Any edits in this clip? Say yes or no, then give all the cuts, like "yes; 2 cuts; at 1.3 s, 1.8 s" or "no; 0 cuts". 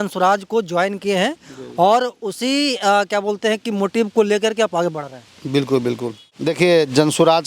yes; 1 cut; at 6.5 s